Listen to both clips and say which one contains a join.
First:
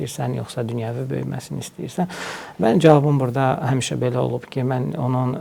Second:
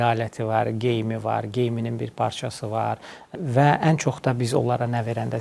second; 1 cut; at 3.3 s

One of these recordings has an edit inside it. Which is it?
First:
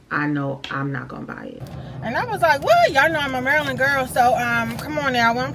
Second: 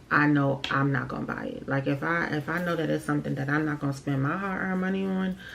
first; 1 cut; at 1.6 s

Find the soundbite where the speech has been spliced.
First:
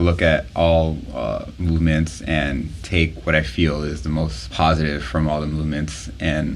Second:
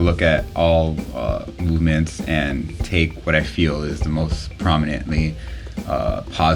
first; 1 cut; at 4.5 s

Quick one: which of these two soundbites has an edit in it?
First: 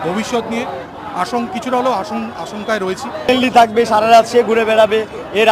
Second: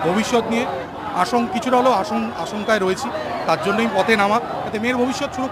first; 1 cut; at 3.3 s

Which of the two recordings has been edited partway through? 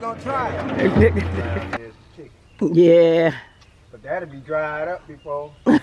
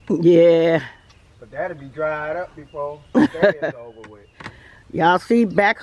first; 1 cut; at 1.6 s

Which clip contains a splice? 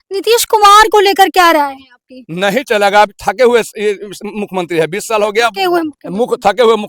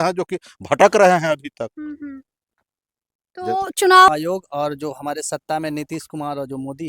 second; 1 cut; at 4.1 s

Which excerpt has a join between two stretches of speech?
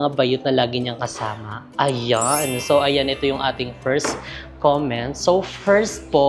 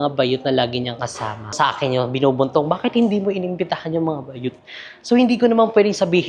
second; 1 cut; at 1.5 s

